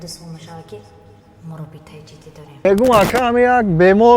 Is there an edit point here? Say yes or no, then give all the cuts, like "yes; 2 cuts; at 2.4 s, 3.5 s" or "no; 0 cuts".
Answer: yes; 1 cut; at 2.7 s